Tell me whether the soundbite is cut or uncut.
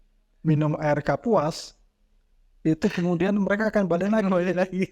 uncut